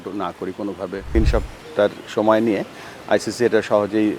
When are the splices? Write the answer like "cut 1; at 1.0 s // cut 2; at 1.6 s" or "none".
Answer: cut 1; at 1.1 s